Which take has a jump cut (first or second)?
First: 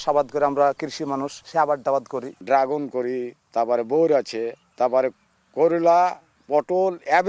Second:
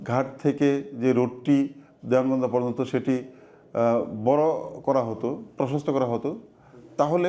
first